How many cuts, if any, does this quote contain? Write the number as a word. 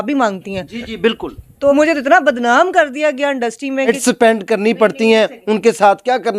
two